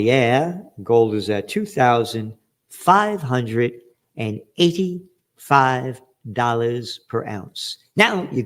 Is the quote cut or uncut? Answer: uncut